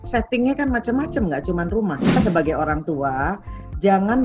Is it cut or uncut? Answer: cut